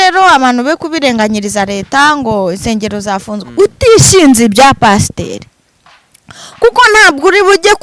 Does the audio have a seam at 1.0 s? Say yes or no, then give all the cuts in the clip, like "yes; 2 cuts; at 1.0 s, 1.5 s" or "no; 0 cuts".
no; 1 cut; at 3.4 s